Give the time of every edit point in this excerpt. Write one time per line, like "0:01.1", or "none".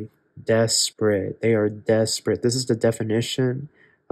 none

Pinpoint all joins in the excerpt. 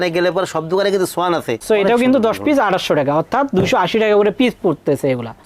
0:01.5

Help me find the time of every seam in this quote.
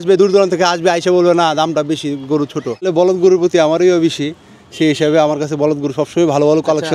0:02.9

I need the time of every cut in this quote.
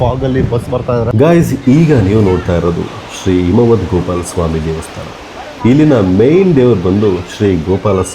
0:01.1

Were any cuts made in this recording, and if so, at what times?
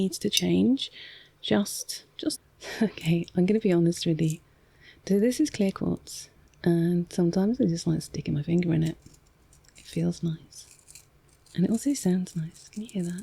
0:02.4

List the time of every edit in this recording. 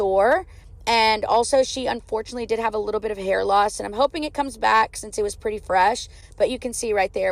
none

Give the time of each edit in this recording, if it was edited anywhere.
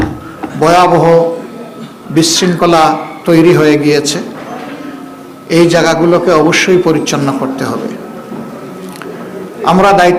none

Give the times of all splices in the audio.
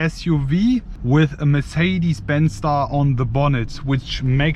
0:00.9

